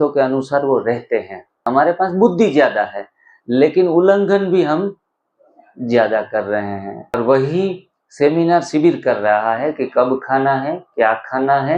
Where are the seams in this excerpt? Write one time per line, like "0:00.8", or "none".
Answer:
0:01.7
0:07.2